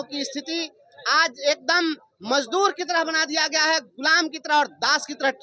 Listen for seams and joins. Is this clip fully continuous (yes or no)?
yes